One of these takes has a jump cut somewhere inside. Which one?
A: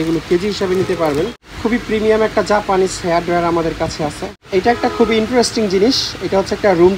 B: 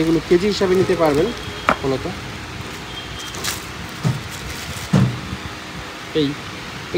A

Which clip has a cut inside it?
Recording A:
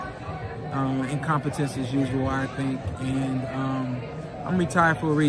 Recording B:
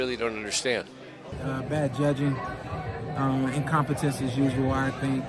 B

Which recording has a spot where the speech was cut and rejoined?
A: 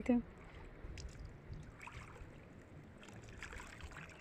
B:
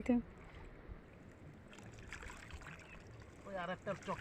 B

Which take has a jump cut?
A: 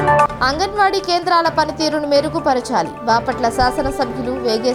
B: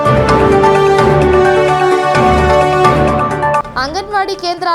B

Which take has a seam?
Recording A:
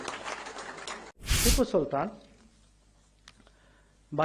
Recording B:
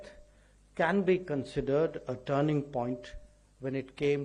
A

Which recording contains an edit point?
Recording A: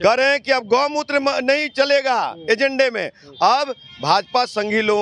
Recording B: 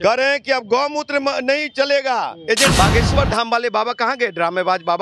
B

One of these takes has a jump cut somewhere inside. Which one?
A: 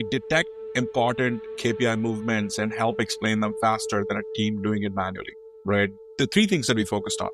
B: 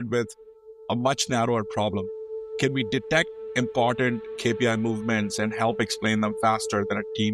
A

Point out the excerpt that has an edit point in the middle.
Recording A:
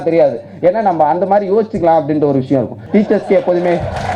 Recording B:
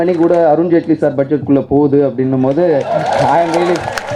A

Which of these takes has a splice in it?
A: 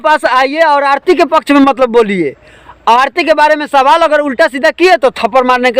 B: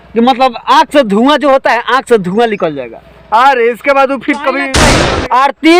B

